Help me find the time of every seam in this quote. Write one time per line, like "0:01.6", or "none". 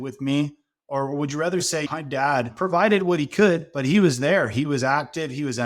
0:02.2